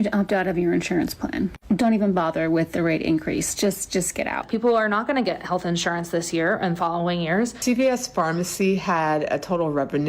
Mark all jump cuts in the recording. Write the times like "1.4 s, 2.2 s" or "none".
4.4 s, 7.6 s